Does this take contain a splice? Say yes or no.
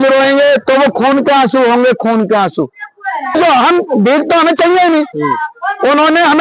yes